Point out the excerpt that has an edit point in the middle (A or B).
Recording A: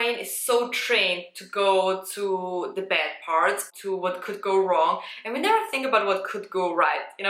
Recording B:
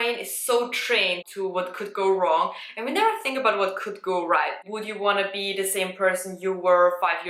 B